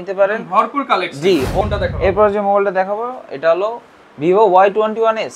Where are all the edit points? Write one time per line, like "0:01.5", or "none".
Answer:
0:01.6